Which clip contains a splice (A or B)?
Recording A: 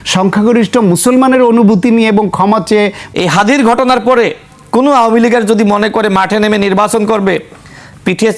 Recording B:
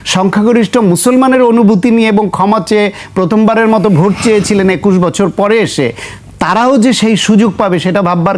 A